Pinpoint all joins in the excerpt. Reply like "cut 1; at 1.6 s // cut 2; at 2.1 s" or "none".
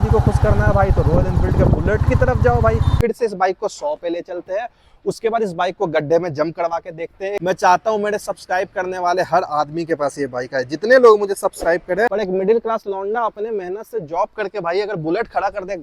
cut 1; at 3.0 s // cut 2; at 7.4 s // cut 3; at 12.1 s